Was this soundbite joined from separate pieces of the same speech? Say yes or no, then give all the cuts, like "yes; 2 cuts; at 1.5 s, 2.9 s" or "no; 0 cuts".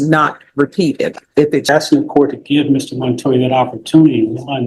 yes; 1 cut; at 1.7 s